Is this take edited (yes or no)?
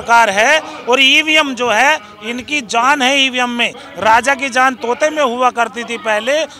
no